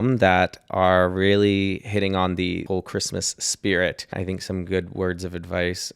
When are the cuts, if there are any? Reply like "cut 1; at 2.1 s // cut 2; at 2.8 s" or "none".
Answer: cut 1; at 2.6 s // cut 2; at 4.1 s